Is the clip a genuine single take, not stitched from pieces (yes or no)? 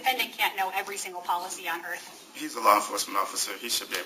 yes